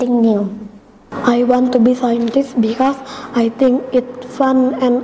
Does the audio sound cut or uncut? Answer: cut